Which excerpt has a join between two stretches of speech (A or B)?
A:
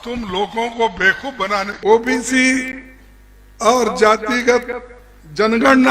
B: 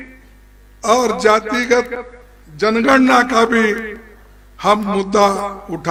A